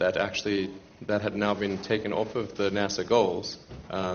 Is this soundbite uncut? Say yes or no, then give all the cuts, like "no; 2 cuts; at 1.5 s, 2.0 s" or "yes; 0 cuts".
yes; 0 cuts